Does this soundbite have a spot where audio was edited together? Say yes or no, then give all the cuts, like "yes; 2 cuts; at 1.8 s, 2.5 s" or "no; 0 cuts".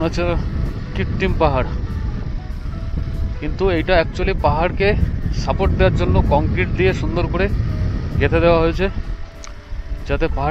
no; 0 cuts